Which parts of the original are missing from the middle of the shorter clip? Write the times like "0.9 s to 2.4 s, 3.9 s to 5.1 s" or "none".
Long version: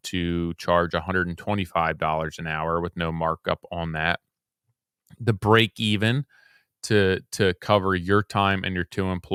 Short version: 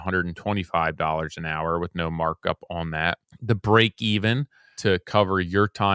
4.3 s to 5.1 s, 6.5 s to 7.3 s